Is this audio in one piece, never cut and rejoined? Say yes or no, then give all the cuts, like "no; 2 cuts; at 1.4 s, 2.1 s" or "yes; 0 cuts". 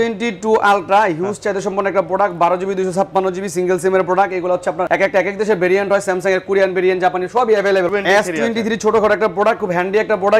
no; 2 cuts; at 4.8 s, 7.9 s